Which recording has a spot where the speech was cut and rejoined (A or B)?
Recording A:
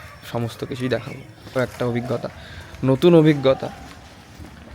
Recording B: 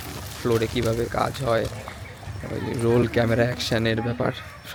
A